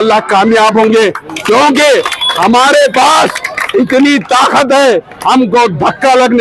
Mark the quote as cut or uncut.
uncut